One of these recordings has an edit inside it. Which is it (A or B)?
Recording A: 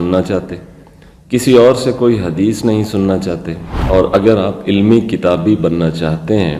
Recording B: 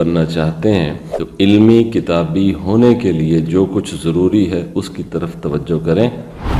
A